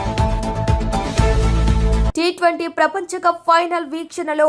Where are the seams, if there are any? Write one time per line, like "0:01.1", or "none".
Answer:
0:02.1